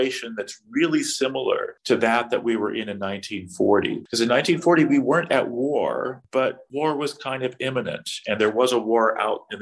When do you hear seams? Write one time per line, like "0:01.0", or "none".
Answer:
0:01.7
0:04.0
0:06.4